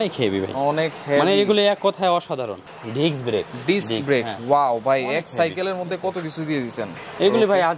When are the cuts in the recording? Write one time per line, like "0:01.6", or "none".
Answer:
0:02.6
0:06.9